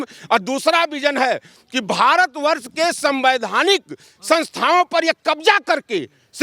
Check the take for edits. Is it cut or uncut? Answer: uncut